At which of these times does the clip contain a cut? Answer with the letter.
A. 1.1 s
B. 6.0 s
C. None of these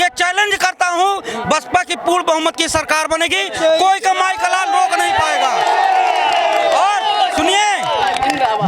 C